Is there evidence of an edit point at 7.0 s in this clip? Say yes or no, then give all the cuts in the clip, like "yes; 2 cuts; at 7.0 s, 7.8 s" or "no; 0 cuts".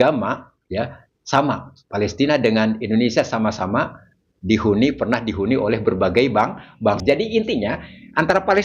yes; 1 cut; at 7.0 s